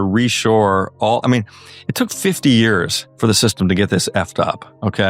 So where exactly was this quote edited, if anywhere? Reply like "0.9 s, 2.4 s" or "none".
3.0 s